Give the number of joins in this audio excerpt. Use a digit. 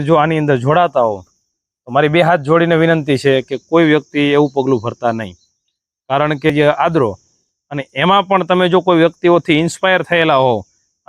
1